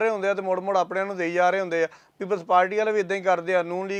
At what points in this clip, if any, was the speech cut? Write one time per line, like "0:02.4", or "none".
none